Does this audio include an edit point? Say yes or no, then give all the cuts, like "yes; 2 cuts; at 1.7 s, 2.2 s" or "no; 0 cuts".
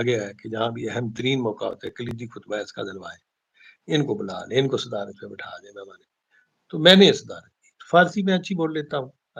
no; 0 cuts